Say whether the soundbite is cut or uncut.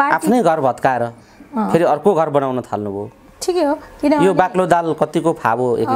uncut